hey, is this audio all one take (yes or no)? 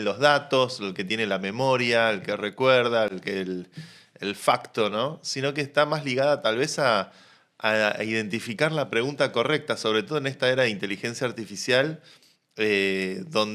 yes